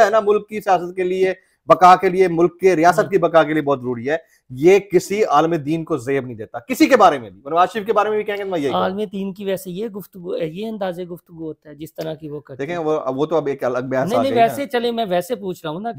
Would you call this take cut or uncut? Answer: uncut